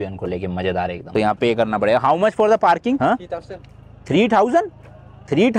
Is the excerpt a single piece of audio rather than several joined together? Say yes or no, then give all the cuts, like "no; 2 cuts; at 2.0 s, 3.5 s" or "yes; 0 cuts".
no; 2 cuts; at 1.1 s, 3.0 s